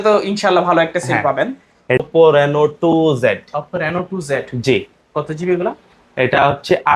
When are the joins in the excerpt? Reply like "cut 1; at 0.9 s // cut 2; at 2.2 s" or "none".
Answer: cut 1; at 2.0 s